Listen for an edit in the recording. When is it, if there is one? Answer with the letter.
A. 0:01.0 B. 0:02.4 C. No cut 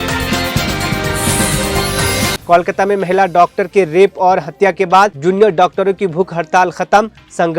B